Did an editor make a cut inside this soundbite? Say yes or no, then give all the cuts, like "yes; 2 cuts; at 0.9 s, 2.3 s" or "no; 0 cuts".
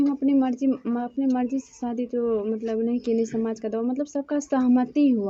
no; 0 cuts